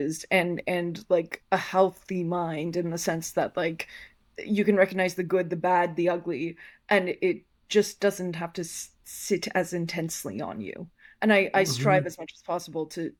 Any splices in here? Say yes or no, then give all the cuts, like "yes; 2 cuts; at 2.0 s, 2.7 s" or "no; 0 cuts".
no; 0 cuts